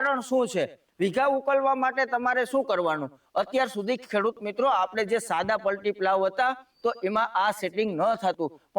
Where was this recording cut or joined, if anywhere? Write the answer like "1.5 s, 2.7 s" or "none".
3.2 s